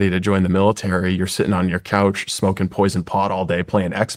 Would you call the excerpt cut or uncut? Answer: uncut